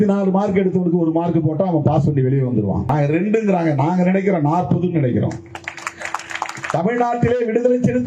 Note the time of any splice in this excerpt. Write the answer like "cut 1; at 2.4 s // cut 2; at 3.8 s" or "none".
cut 1; at 2.9 s